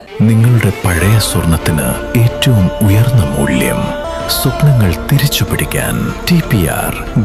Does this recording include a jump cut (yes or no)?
no